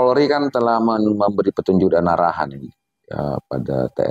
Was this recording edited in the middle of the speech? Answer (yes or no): no